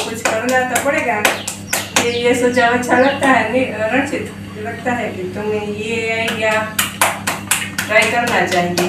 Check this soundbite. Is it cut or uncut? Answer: cut